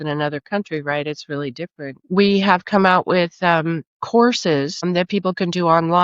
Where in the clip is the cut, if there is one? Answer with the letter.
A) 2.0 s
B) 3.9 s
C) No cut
A